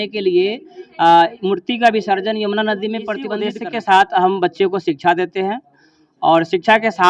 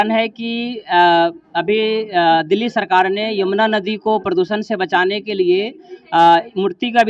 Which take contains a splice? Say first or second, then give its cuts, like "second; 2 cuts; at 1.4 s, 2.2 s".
first; 1 cut; at 3.5 s